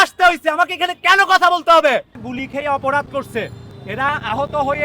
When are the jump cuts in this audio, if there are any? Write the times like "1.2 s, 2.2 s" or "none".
2.2 s